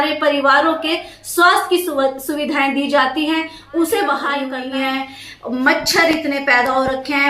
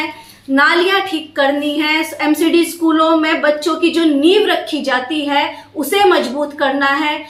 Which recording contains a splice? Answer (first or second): first